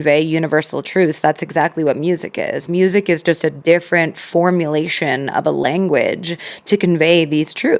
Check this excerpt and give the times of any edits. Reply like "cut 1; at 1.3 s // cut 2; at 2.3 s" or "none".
none